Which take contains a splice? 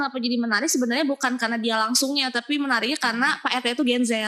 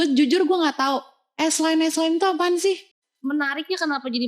second; 1 cut; at 2.9 s

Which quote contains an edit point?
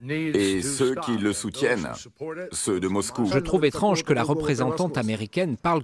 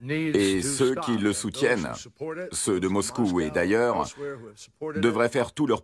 second; 1 cut; at 3.3 s

